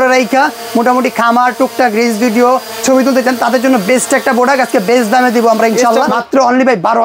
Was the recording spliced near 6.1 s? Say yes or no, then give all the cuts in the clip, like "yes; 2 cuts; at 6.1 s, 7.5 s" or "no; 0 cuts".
yes; 1 cut; at 6.1 s